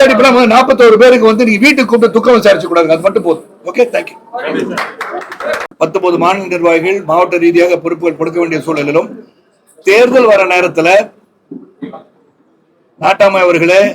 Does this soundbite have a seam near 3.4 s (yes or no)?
no